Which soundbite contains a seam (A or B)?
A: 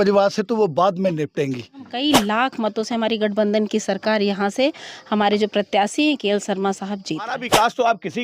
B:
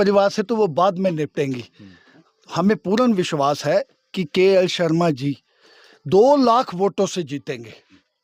A